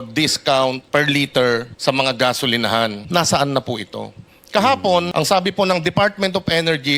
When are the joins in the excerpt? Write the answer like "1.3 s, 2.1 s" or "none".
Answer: 0.8 s, 1.7 s, 3.0 s, 5.1 s